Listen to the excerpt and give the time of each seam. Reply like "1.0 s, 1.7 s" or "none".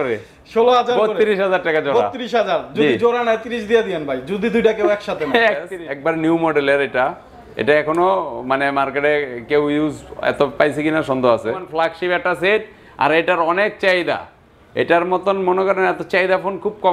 5.8 s, 11.6 s